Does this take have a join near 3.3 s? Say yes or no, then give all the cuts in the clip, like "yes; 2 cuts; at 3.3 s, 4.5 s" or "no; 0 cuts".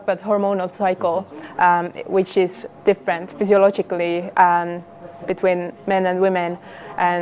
no; 0 cuts